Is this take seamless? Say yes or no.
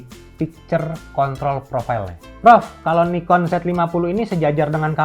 no